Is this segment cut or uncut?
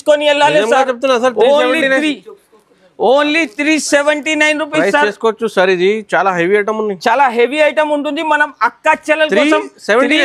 uncut